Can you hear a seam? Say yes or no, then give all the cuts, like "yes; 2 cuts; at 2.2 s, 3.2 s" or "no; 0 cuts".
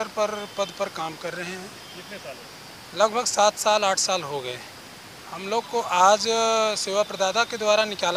no; 0 cuts